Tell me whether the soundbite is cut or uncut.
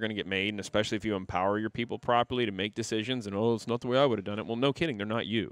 uncut